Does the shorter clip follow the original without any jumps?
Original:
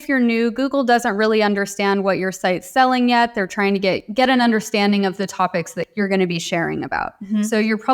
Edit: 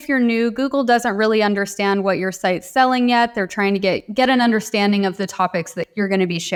yes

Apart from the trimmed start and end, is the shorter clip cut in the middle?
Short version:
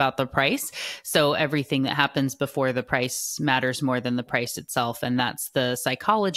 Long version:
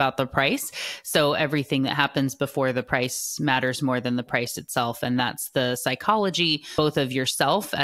no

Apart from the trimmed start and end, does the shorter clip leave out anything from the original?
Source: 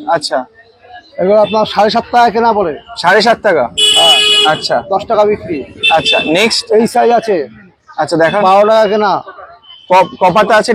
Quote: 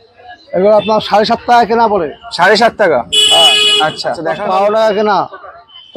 yes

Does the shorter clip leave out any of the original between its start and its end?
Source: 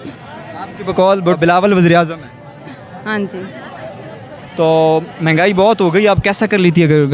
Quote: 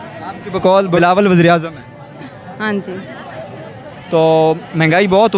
yes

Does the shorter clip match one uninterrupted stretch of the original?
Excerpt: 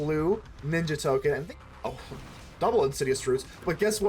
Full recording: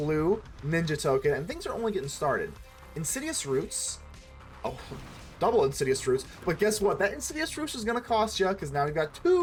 no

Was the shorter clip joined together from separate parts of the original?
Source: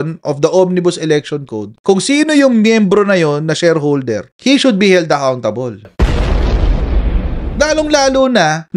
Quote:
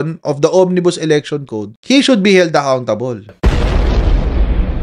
yes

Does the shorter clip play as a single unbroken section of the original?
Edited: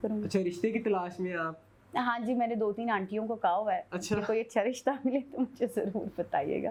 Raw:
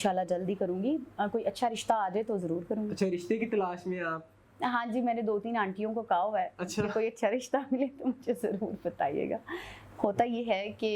yes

